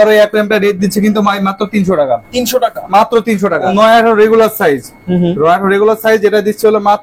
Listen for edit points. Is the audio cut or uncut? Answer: cut